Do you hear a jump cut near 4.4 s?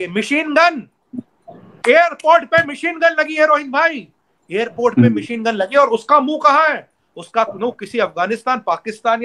no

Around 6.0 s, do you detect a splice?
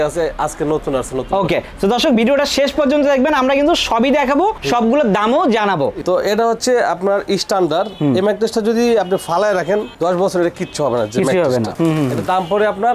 yes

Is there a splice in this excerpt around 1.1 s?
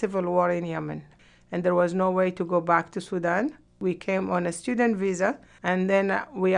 yes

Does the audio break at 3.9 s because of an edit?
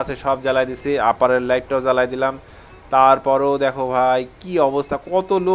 no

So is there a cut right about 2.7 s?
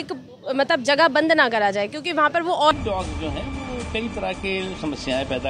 yes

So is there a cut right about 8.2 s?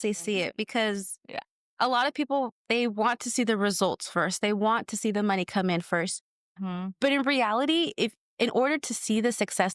yes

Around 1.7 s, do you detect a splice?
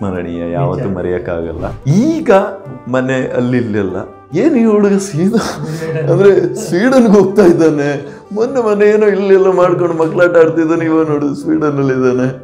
yes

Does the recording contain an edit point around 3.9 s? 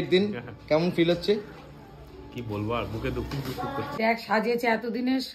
yes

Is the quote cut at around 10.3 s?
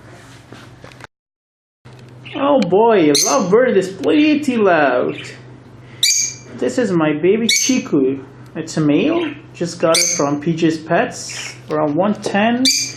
no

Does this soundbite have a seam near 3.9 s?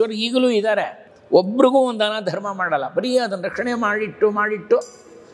no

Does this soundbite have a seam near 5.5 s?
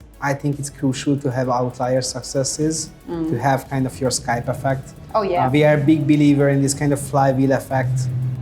yes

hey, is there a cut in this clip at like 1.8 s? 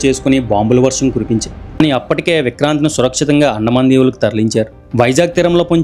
yes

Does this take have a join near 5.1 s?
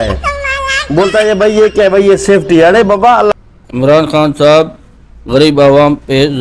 no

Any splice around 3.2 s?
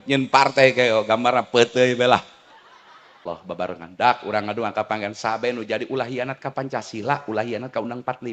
yes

